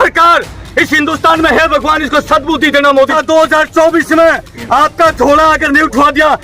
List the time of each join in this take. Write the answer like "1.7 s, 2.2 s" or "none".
3.1 s